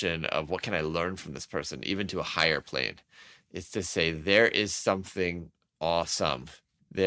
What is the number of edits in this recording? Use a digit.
0